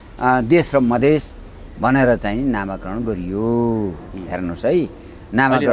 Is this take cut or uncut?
uncut